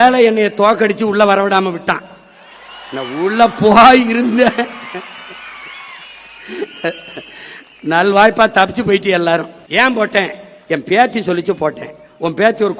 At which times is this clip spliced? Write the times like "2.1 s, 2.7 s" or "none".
9.6 s